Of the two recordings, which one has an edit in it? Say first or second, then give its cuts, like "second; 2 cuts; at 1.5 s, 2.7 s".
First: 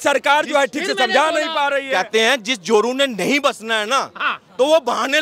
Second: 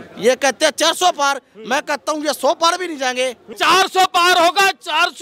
second; 1 cut; at 3.5 s